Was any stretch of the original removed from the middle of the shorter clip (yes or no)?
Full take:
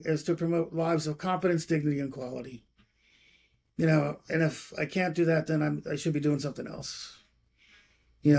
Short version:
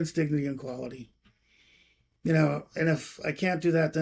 no